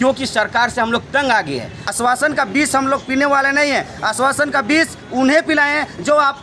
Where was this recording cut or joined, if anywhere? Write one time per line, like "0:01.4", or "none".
0:01.8